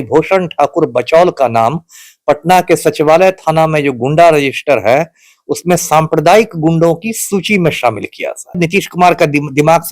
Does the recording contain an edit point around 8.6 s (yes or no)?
yes